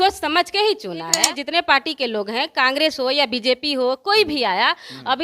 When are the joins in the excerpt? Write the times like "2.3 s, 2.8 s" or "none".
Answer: 1.2 s